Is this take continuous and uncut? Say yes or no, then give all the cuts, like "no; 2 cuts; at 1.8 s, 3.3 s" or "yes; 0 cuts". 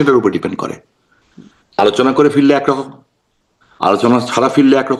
yes; 0 cuts